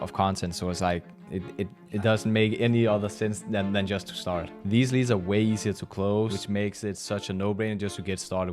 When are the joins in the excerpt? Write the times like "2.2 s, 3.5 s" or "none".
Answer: 4.5 s, 6.4 s